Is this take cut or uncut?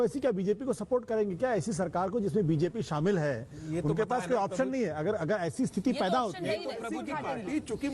cut